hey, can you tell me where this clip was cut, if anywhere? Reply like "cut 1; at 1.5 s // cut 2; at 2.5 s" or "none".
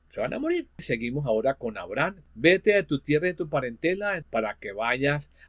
cut 1; at 0.9 s // cut 2; at 2.2 s // cut 3; at 4.2 s